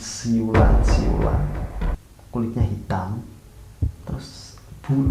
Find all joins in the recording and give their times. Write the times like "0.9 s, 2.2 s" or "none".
2.0 s